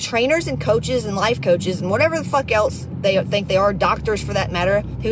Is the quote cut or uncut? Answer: uncut